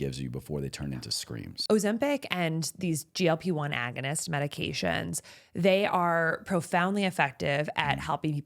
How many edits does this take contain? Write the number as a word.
one